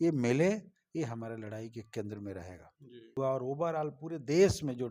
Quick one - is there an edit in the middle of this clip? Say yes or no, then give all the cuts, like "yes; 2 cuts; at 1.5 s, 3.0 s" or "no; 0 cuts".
yes; 1 cut; at 3.2 s